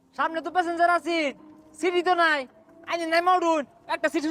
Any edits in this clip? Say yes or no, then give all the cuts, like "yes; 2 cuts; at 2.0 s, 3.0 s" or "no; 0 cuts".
no; 0 cuts